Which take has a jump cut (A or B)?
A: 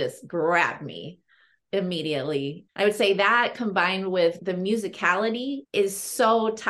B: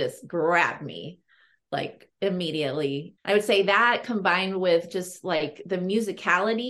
A